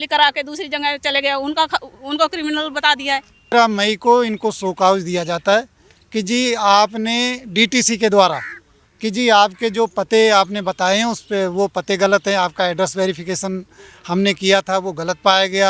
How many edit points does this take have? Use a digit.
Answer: 1